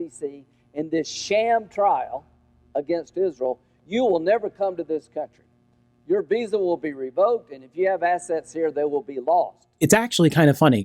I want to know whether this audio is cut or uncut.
cut